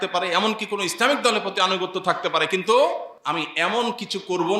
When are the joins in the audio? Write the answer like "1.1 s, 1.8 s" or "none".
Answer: 3.1 s